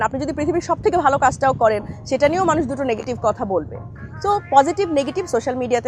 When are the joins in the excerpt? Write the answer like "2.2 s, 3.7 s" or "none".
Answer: none